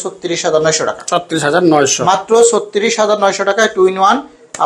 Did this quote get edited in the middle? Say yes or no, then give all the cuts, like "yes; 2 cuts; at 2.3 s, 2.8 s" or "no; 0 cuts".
no; 0 cuts